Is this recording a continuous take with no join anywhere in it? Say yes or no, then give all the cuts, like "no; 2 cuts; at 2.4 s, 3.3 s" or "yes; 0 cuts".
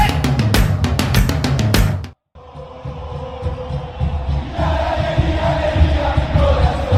yes; 0 cuts